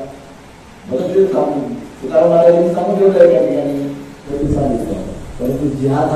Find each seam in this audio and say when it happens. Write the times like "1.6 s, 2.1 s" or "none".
4.3 s